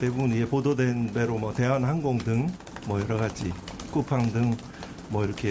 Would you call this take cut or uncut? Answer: uncut